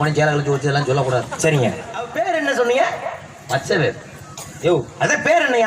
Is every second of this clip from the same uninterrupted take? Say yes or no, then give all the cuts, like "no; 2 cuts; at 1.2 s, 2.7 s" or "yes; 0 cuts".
no; 1 cut; at 2.0 s